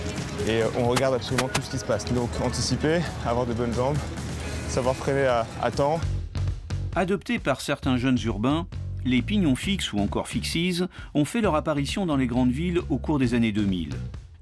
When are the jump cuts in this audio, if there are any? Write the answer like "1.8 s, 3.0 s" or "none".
12.6 s